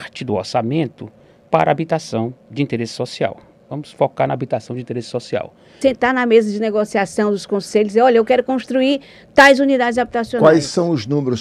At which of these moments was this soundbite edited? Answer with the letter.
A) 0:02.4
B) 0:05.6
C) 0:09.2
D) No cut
B